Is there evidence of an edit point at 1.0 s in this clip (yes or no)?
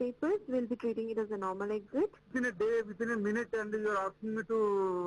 no